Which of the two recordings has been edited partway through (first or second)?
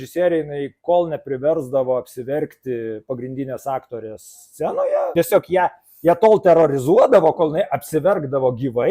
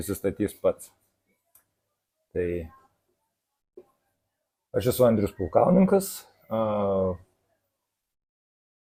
first